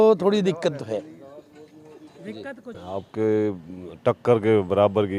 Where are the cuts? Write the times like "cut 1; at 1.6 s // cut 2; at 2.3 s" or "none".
cut 1; at 2.7 s